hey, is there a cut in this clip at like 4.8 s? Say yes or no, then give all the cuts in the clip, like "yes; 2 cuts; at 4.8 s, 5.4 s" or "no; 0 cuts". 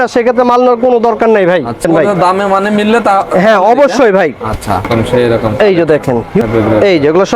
yes; 3 cuts; at 1.8 s, 4.8 s, 6.4 s